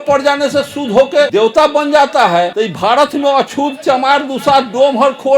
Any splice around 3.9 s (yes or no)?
no